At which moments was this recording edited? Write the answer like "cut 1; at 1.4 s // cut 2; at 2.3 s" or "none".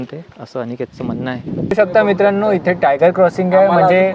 cut 1; at 1.7 s